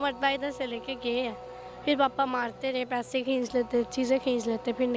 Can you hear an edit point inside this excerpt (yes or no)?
no